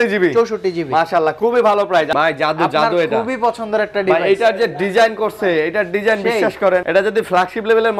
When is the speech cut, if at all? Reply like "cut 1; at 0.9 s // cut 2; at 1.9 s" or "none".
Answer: cut 1; at 2.1 s // cut 2; at 6.9 s